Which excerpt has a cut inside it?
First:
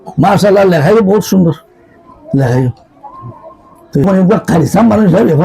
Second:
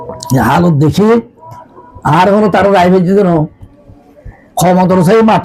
first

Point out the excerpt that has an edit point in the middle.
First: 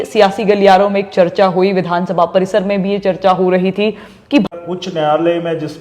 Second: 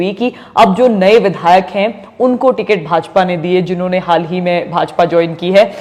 first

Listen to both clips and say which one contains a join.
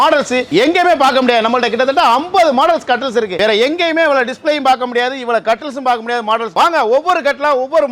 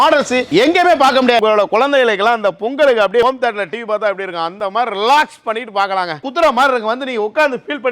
second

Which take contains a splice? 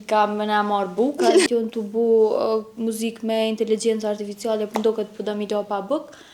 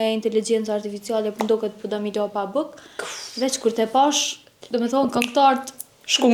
first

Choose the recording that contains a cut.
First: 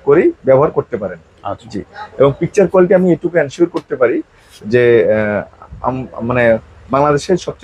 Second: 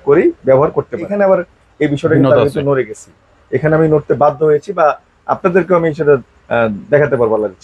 second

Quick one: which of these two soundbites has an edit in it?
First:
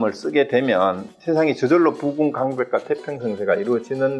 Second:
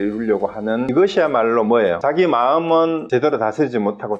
second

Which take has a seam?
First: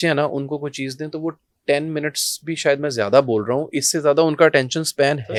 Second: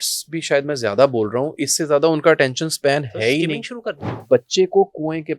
second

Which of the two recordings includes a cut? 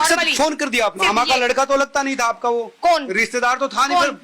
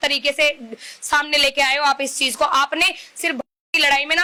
first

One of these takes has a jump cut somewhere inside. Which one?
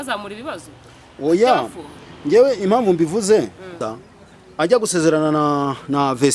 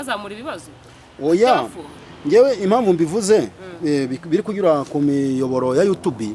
first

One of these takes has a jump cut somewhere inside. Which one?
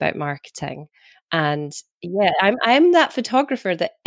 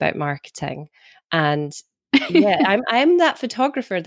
first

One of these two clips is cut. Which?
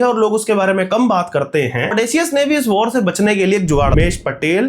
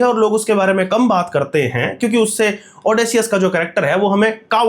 first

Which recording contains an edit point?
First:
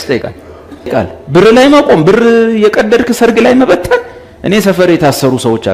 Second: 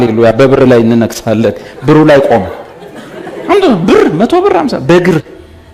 first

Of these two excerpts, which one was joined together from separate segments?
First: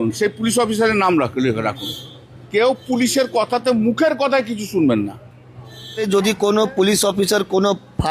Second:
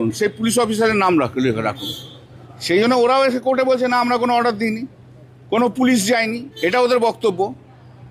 first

